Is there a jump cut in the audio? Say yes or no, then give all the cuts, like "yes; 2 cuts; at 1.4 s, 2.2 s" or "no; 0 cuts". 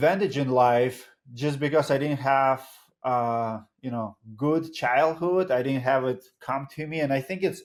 no; 0 cuts